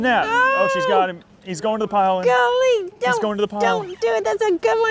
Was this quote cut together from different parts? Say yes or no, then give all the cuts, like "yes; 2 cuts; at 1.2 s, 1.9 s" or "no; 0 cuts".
no; 0 cuts